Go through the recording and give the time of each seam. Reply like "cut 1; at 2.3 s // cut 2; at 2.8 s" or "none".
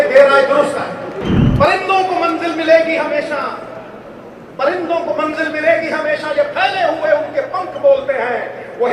cut 1; at 1.3 s